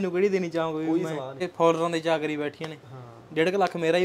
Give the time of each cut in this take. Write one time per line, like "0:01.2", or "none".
0:01.4